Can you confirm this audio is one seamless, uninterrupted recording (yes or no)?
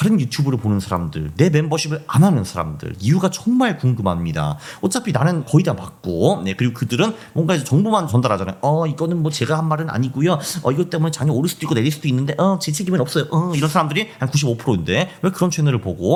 yes